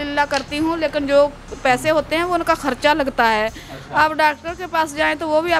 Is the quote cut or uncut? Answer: uncut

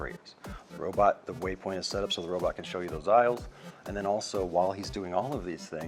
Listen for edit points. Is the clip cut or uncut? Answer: uncut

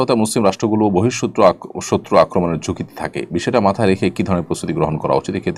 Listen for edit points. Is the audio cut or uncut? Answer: uncut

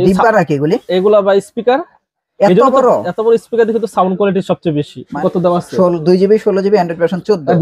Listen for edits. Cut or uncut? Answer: cut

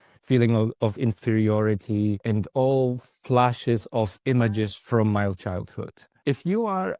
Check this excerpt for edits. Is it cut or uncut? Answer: cut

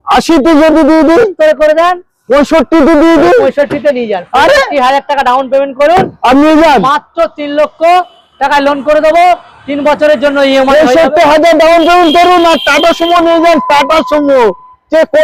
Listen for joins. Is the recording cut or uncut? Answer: uncut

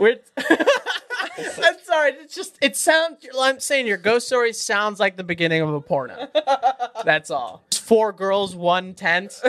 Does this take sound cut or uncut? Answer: cut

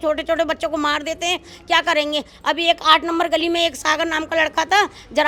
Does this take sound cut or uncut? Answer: uncut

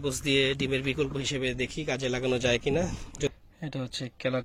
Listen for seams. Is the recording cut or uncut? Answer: cut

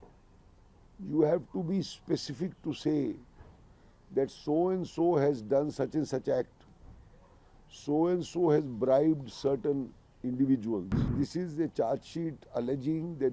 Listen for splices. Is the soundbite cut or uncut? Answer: cut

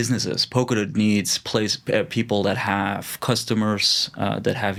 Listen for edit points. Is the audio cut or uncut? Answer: uncut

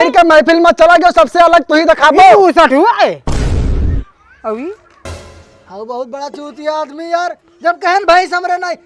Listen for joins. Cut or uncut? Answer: cut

